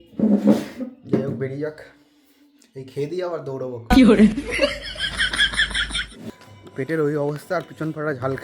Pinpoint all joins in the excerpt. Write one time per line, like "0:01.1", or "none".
0:06.3